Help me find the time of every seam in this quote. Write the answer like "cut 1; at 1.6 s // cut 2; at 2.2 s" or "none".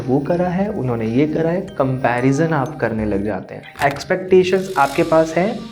cut 1; at 3.6 s